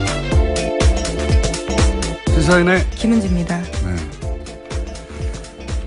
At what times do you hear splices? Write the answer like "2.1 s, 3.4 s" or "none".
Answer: 2.4 s